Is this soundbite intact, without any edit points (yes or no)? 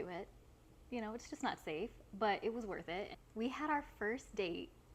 no